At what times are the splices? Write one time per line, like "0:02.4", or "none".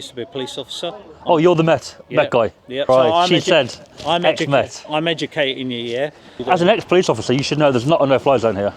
0:02.8
0:06.4